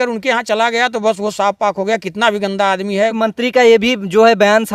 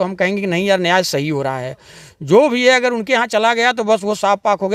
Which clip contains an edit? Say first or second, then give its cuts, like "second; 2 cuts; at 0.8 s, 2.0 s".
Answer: first; 1 cut; at 3.1 s